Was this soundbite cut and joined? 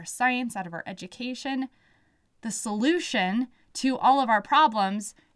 no; 0 cuts

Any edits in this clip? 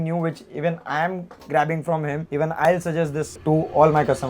yes; 1 cut; at 2.2 s

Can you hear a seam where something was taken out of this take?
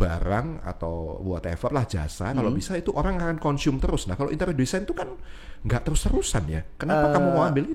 no; 0 cuts

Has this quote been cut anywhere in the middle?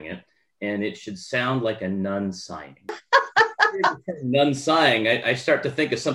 yes; 1 cut; at 3.0 s

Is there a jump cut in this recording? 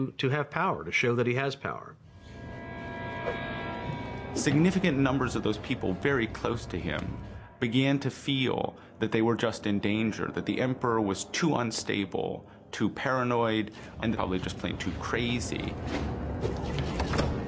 yes; 1 cut; at 9.2 s

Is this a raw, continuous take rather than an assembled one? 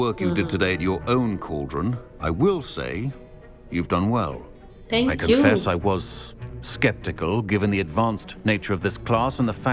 yes; 0 cuts

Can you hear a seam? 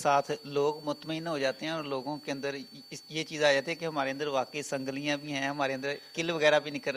no; 0 cuts

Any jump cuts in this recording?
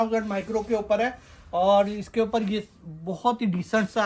no; 0 cuts

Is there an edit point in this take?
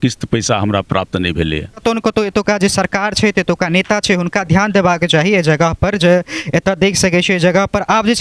yes; 1 cut; at 1.8 s

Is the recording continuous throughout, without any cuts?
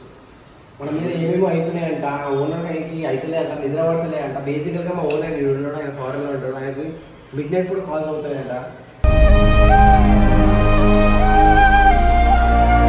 yes; 0 cuts

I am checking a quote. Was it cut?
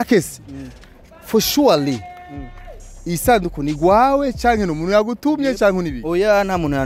no; 0 cuts

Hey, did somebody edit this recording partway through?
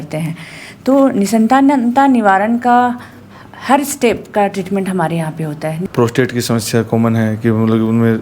yes; 1 cut; at 5.8 s

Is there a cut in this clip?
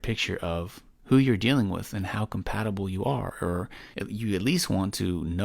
yes; 1 cut; at 3.8 s

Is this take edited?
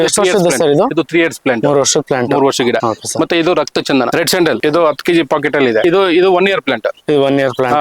no; 0 cuts

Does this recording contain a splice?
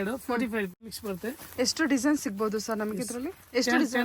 yes; 1 cut; at 1.0 s

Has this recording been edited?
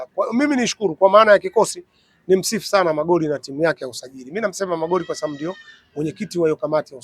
no; 0 cuts

